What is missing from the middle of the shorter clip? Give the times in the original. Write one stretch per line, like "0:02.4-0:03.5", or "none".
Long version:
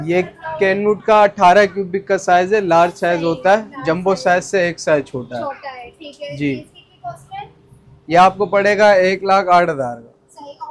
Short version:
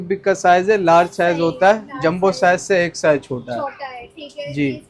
none